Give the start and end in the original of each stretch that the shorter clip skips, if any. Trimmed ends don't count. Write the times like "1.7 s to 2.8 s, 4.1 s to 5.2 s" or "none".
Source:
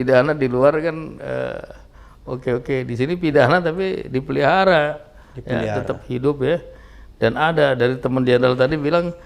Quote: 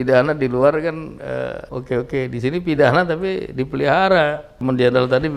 1.7 s to 2.2 s, 5.1 s to 8.0 s